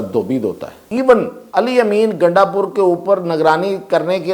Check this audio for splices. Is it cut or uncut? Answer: cut